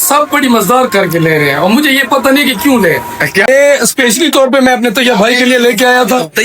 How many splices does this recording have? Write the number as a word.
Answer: one